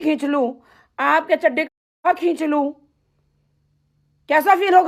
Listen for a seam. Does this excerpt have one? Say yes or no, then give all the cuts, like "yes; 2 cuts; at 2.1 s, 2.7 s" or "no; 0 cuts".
no; 0 cuts